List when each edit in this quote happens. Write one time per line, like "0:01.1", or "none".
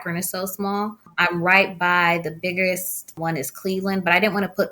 0:01.1
0:03.1